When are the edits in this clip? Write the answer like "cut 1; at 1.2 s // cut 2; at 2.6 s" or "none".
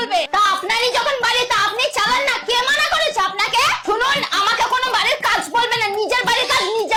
none